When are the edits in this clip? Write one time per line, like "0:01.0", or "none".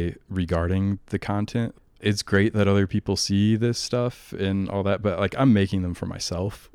0:02.0